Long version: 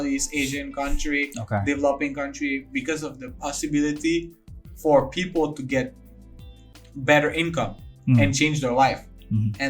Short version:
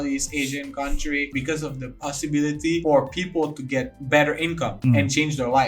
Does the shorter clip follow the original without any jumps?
no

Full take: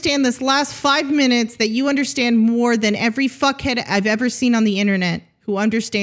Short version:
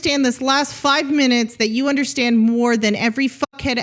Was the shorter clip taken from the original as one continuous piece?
yes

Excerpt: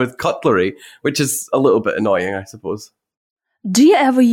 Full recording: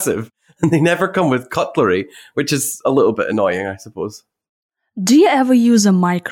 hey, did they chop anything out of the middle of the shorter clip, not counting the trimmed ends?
no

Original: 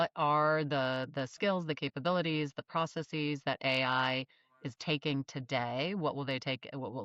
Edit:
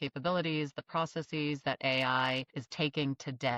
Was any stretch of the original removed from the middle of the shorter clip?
yes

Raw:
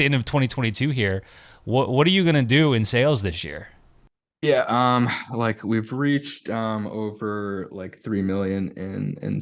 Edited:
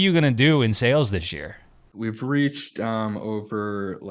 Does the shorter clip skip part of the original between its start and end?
yes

